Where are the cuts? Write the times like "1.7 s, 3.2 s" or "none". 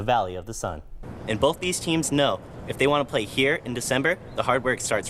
1.1 s